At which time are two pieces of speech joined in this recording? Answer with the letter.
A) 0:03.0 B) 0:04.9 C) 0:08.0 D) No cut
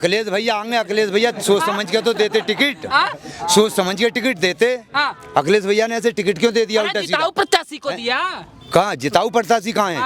D